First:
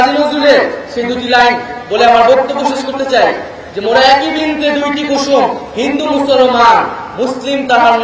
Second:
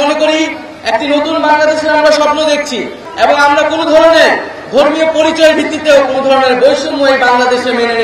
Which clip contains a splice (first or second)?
second